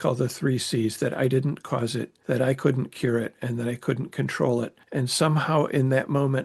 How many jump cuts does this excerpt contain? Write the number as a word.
two